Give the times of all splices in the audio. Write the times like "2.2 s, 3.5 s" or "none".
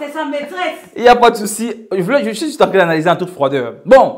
none